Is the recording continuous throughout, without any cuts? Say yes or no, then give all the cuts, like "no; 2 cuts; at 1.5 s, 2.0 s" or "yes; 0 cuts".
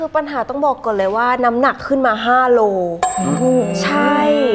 yes; 0 cuts